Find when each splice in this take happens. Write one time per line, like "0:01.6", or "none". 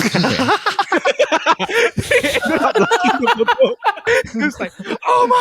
0:04.0

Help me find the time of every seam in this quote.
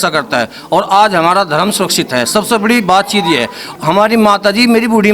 0:03.6

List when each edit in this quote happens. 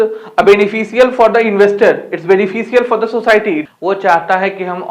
0:03.7

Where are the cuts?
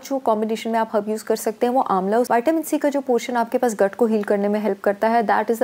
0:02.3

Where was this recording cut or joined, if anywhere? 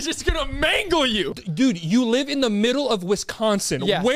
0:01.4

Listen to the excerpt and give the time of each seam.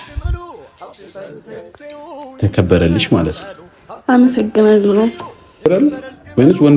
0:05.7

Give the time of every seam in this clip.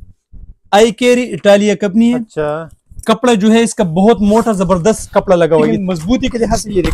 0:05.7

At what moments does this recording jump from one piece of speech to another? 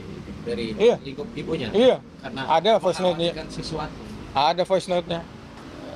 none

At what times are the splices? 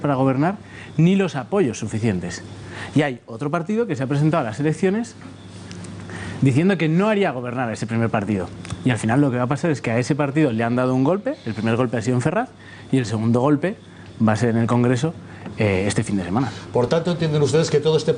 none

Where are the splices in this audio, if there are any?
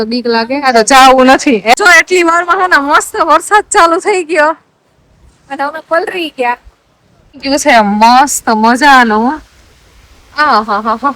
0:01.7
0:07.4

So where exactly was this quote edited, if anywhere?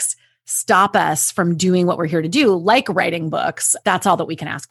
0:03.7

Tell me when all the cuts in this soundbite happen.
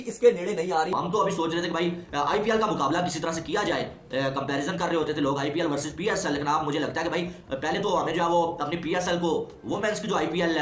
0:00.9

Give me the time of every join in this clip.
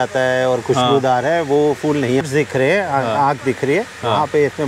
0:02.2

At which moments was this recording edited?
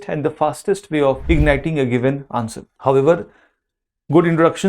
0:01.2
0:02.6

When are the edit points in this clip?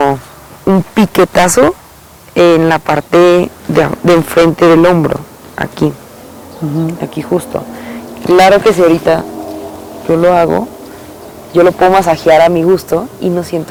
none

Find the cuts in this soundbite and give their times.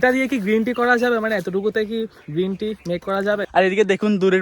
0:03.4

